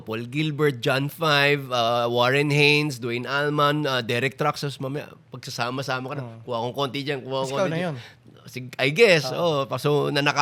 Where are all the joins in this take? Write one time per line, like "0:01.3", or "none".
none